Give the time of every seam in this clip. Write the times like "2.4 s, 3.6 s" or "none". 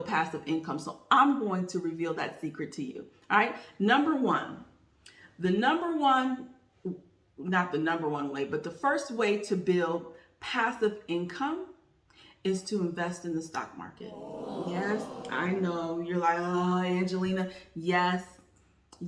none